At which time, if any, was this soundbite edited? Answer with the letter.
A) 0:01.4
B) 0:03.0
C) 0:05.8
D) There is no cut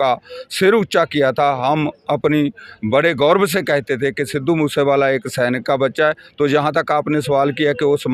D